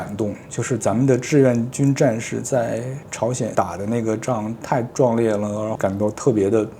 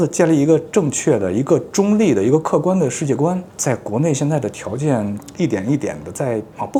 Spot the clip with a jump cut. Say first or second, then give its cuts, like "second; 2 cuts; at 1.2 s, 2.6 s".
first; 1 cut; at 5.7 s